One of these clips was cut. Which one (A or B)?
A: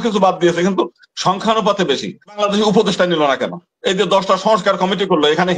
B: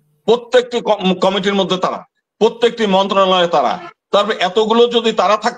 A